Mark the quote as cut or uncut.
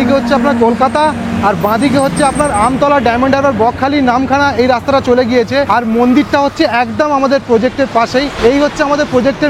uncut